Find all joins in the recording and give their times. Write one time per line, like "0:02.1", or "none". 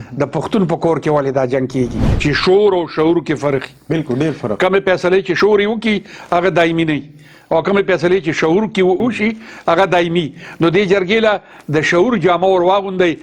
0:02.0
0:05.3
0:09.0